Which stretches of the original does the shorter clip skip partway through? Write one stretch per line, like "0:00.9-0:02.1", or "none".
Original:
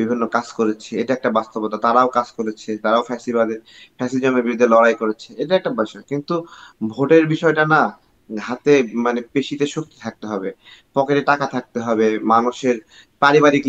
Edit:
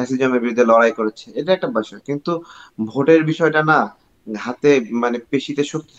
none